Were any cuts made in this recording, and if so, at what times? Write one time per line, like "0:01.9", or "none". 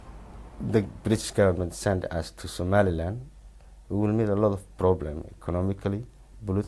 none